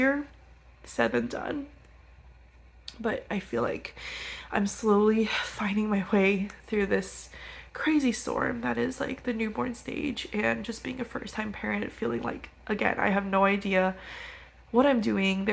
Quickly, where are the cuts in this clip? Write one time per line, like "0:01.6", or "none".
none